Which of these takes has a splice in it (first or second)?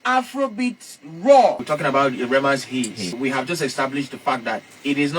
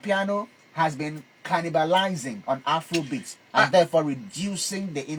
first